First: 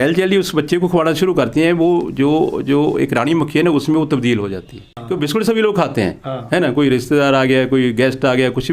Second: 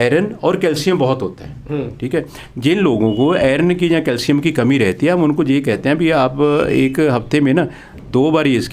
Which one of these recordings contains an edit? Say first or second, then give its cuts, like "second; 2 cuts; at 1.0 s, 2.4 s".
first; 1 cut; at 5.0 s